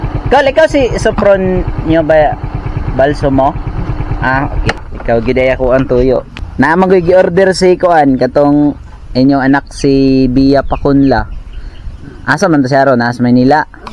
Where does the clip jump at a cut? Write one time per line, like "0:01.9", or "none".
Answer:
0:04.9
0:06.4

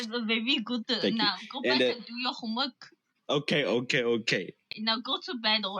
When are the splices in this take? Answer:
0:04.7

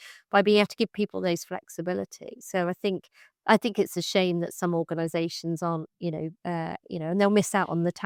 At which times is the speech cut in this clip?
none

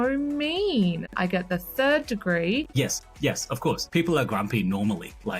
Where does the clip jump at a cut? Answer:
0:01.1
0:02.7
0:03.8

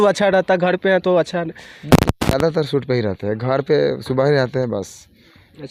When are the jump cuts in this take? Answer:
none

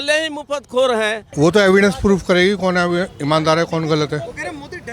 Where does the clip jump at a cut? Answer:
0:01.2

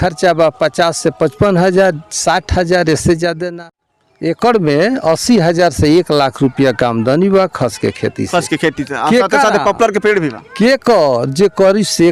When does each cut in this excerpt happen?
0:03.4

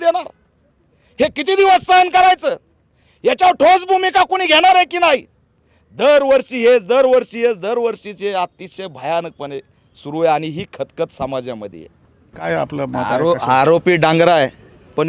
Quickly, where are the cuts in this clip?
0:12.5

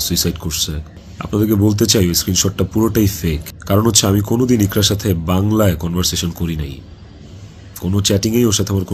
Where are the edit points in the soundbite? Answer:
none

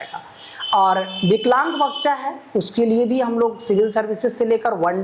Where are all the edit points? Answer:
none

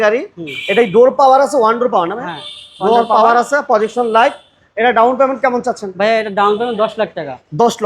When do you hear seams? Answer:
none

